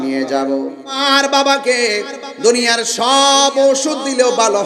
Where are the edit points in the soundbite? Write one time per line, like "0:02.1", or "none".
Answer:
0:01.0